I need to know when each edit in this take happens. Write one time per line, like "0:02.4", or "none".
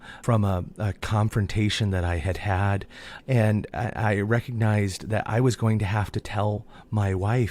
none